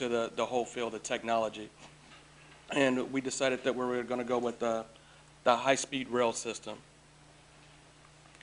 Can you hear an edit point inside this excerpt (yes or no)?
yes